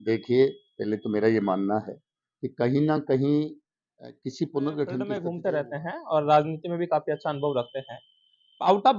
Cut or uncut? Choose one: cut